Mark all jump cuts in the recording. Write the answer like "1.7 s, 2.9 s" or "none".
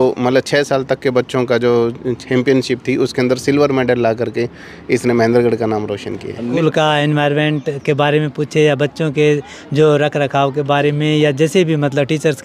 6.6 s